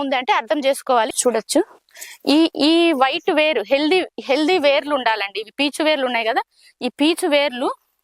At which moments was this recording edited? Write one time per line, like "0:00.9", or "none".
0:01.1